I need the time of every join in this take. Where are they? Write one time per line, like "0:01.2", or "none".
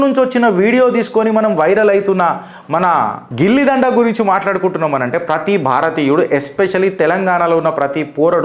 none